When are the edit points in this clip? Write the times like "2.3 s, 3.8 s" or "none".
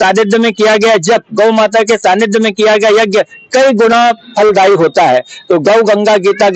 none